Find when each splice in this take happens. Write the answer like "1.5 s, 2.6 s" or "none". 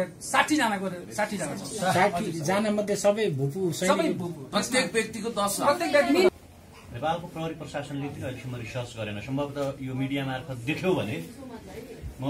6.3 s